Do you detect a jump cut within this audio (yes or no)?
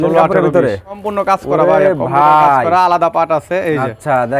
yes